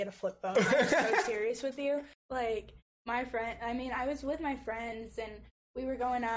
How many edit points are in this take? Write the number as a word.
one